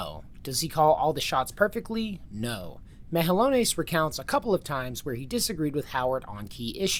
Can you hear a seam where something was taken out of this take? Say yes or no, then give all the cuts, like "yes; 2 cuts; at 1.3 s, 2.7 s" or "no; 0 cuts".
no; 0 cuts